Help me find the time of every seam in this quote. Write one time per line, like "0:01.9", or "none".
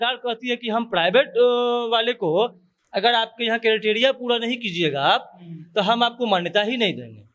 none